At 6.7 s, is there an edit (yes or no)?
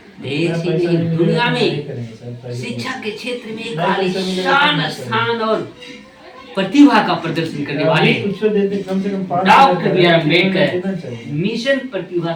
no